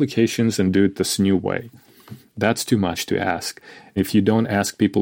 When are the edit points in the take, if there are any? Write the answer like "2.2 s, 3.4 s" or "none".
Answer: 3.9 s